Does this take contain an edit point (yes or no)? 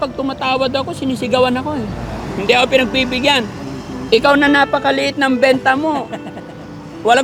no